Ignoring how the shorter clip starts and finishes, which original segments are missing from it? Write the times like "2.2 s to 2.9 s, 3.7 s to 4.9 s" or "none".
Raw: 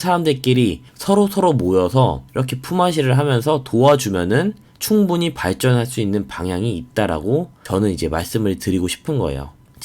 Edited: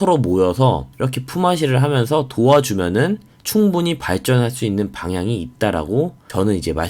none